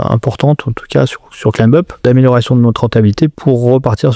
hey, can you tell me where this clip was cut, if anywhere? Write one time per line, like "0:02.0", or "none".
0:02.0
0:03.4